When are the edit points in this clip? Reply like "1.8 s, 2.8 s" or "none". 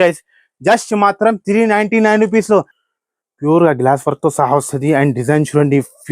2.8 s